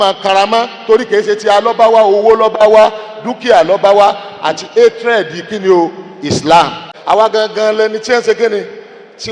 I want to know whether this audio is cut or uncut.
cut